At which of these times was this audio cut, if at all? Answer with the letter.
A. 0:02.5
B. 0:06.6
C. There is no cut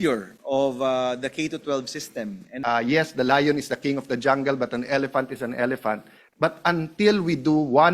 A